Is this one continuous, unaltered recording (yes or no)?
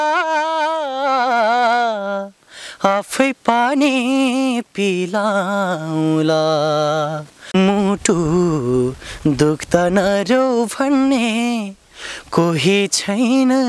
yes